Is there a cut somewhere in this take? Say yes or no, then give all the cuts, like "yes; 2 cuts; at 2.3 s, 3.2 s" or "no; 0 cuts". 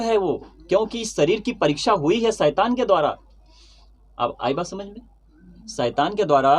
no; 0 cuts